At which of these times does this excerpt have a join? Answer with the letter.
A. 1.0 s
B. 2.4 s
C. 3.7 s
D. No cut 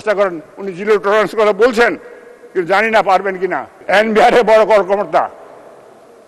C